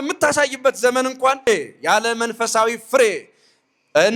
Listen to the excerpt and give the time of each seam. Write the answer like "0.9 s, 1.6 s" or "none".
1.5 s